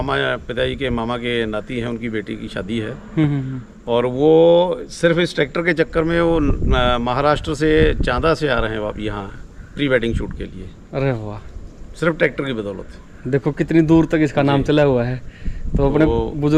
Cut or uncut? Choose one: uncut